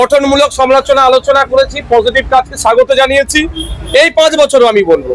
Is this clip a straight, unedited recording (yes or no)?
yes